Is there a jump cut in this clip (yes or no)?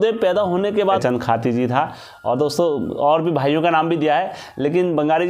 yes